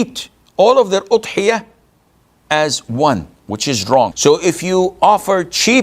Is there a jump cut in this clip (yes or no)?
yes